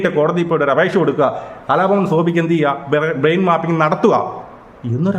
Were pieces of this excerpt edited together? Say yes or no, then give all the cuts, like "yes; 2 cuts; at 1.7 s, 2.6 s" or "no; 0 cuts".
no; 0 cuts